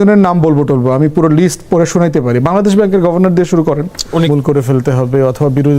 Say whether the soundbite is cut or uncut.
cut